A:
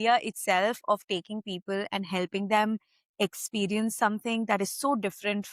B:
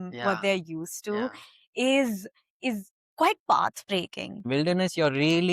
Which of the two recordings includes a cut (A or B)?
B